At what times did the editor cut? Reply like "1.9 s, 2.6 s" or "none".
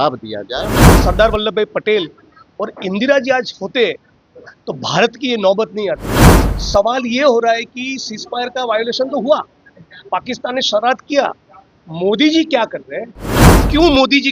0.9 s